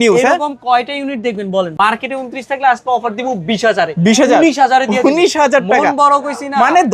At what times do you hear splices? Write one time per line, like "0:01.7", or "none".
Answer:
0:01.7